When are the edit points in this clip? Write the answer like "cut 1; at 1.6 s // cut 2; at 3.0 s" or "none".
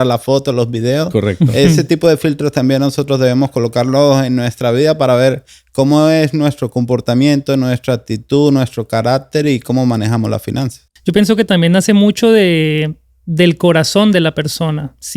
cut 1; at 10.8 s